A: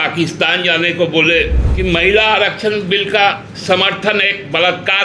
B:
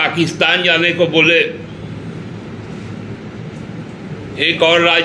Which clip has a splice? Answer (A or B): A